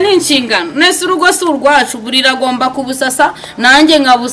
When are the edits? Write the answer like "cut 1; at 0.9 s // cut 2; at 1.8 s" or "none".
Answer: none